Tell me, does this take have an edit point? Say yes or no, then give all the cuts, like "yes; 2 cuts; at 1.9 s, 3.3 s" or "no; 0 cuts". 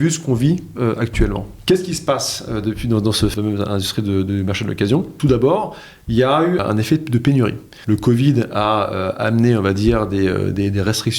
yes; 5 cuts; at 1.5 s, 3.3 s, 5.1 s, 6.6 s, 7.7 s